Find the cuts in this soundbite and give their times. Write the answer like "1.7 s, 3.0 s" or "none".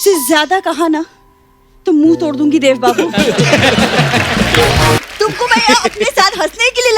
5.0 s